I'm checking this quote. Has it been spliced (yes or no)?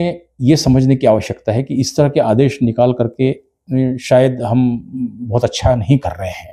no